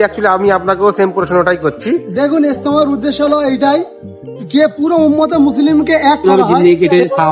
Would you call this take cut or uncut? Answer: cut